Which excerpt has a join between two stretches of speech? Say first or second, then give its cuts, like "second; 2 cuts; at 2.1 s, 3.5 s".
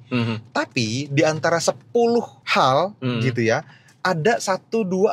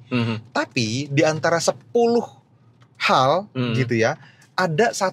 first; 1 cut; at 2.4 s